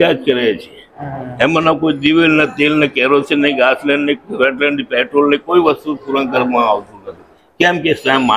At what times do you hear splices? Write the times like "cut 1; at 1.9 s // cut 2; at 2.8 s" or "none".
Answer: none